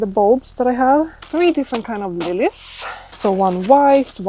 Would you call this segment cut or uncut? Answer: cut